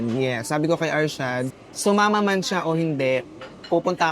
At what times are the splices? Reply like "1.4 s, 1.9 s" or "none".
1.6 s

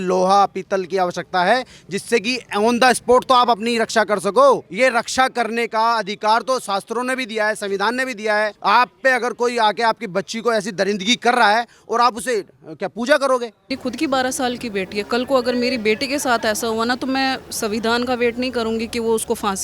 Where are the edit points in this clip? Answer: 4.7 s, 8.6 s, 13.8 s

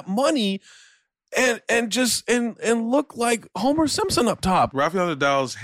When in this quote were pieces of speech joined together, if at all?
4.7 s

